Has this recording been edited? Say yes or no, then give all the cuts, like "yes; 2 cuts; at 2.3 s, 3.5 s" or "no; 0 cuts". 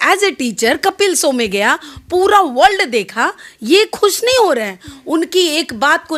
no; 0 cuts